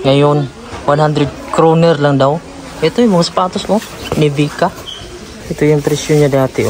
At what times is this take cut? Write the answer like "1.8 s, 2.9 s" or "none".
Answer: 5.3 s